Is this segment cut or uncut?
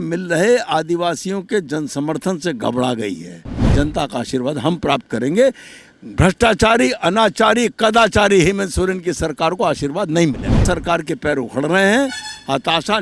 cut